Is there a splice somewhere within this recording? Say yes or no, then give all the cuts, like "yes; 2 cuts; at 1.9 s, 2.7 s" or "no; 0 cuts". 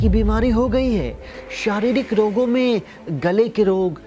yes; 1 cut; at 1.3 s